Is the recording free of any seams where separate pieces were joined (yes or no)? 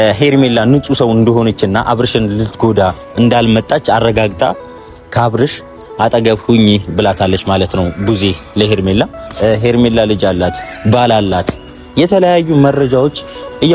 no